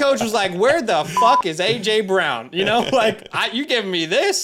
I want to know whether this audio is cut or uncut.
uncut